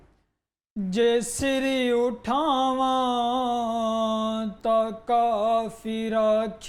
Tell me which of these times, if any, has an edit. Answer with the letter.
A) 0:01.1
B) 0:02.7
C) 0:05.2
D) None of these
D